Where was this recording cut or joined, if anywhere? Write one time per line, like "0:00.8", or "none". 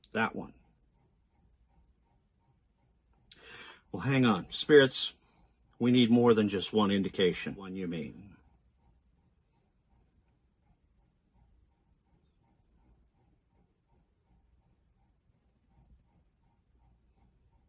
0:07.7